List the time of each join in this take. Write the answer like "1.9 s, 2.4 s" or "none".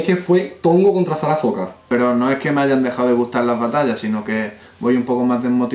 1.8 s

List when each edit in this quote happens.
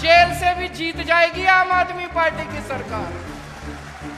3.2 s

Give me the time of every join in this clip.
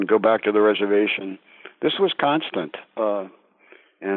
none

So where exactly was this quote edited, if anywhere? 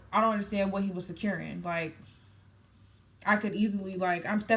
none

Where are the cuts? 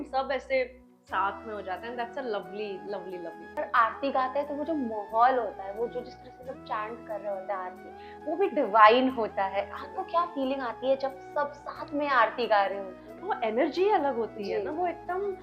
3.4 s

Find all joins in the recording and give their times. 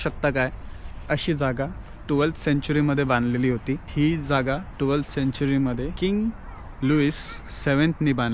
3.9 s, 5.9 s

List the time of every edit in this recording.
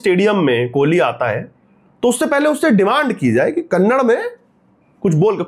none

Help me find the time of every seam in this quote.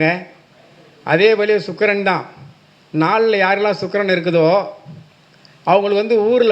none

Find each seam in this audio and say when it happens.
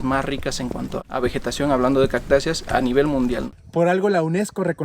1.0 s, 3.5 s

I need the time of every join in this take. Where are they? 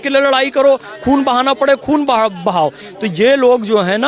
none

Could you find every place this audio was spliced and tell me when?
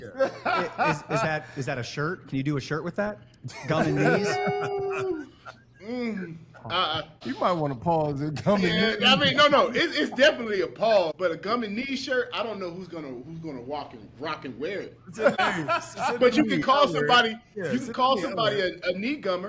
7.1 s, 11.1 s, 15.4 s

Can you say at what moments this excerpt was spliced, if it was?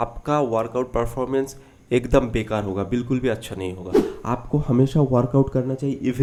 none

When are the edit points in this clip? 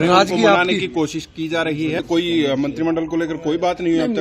2.0 s

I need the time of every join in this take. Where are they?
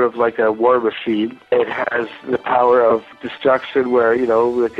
1.5 s, 3.0 s

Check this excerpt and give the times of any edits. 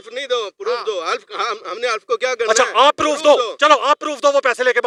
none

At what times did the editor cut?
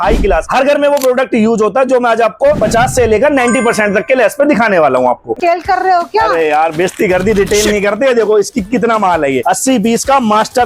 5.3 s, 9.4 s

